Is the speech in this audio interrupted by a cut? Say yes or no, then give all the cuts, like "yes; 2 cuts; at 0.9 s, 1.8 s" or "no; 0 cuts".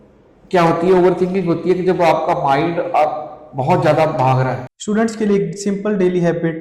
yes; 1 cut; at 4.7 s